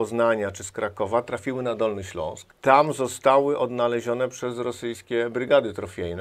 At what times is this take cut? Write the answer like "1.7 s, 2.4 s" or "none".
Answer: 2.4 s